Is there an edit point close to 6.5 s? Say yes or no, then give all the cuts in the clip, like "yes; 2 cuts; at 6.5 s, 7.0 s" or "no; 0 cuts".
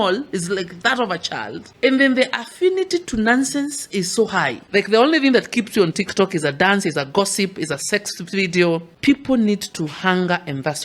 no; 3 cuts; at 1.6 s, 4.6 s, 8.9 s